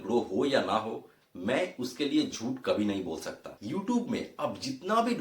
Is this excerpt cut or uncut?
cut